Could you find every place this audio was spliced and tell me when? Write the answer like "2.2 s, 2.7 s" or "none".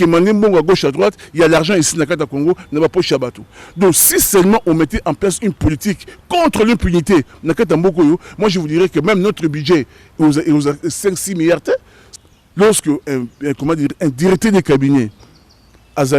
12.0 s

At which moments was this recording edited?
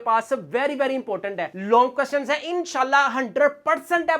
1.5 s

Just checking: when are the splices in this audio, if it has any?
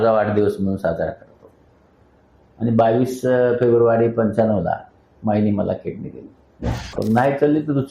7.0 s

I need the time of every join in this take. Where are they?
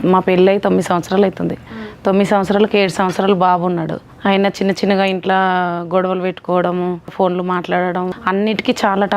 4.0 s, 7.1 s, 8.2 s

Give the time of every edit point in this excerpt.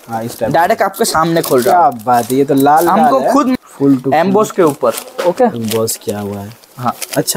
3.5 s

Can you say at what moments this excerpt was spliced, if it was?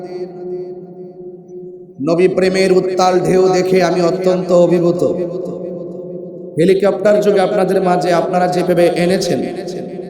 6.4 s

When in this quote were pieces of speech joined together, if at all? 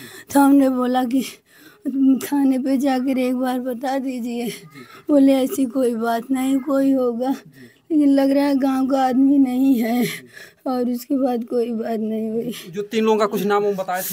none

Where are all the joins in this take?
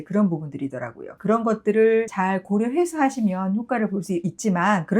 1.0 s

